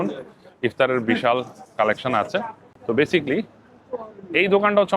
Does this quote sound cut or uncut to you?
uncut